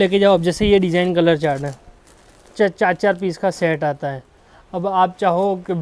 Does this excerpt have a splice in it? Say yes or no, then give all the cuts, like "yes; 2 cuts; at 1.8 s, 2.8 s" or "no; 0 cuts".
no; 0 cuts